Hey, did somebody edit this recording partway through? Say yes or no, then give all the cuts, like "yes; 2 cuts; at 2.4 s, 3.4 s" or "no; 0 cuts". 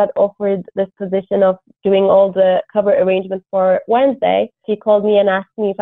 yes; 1 cut; at 4.6 s